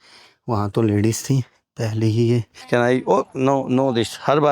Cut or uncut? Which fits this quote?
cut